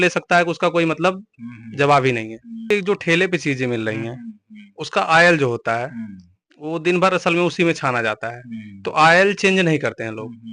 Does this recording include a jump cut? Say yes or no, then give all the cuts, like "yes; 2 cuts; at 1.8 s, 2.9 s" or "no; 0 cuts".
yes; 1 cut; at 2.7 s